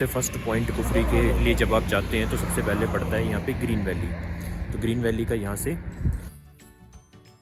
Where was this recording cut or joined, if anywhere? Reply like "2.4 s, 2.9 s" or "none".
none